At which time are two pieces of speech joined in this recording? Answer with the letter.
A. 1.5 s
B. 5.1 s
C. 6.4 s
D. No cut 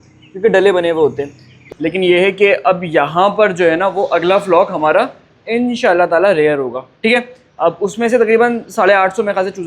A